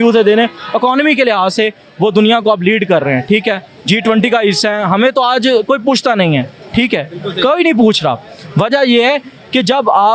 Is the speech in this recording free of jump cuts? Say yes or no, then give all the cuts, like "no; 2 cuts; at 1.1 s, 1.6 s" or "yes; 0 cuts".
yes; 0 cuts